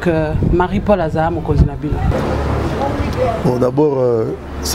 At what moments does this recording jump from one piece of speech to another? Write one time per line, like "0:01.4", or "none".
0:02.1